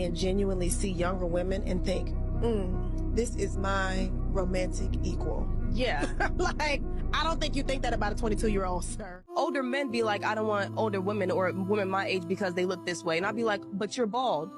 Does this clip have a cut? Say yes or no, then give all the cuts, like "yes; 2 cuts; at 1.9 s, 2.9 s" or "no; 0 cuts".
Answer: yes; 1 cut; at 9.0 s